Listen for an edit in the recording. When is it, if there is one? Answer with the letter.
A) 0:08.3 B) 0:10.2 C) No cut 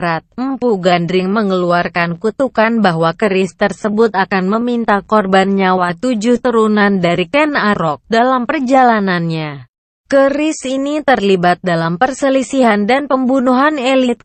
C